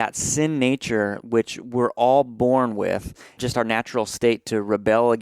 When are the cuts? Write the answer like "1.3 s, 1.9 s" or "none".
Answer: 3.4 s

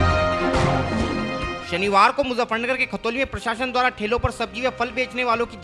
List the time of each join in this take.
1.0 s

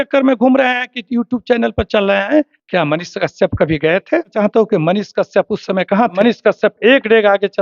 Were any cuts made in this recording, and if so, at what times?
2.6 s, 4.3 s, 6.1 s

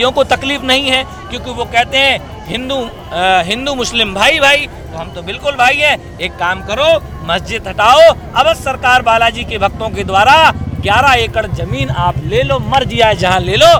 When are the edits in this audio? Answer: none

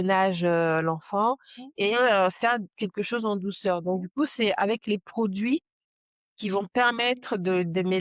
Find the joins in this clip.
none

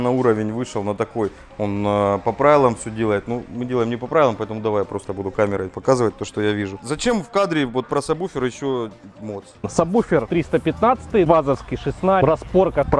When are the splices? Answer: 6.8 s

